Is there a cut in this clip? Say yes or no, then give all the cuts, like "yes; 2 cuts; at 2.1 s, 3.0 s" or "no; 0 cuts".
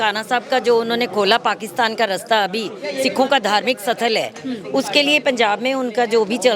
no; 0 cuts